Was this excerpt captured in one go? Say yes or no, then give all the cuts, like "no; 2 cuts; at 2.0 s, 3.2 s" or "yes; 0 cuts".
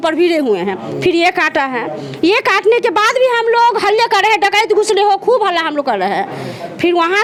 yes; 0 cuts